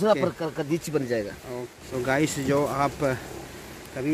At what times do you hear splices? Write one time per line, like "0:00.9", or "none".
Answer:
0:01.8